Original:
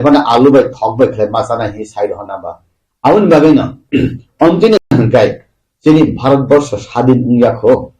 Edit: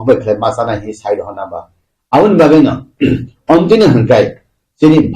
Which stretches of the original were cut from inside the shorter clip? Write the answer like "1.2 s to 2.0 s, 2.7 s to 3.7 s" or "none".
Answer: 4.8 s to 4.9 s